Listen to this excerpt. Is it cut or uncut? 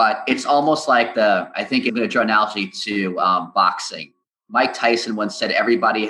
cut